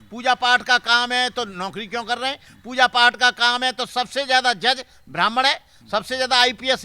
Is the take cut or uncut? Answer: uncut